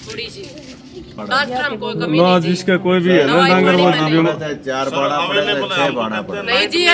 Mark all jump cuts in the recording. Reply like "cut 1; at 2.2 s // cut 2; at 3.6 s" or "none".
cut 1; at 1.2 s